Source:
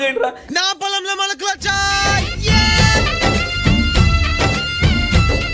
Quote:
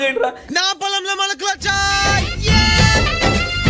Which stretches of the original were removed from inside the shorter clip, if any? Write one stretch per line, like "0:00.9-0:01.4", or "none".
none